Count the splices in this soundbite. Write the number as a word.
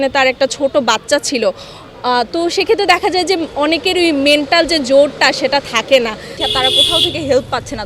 one